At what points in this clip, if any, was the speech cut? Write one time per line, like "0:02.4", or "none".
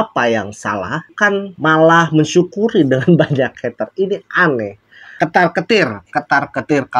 0:05.1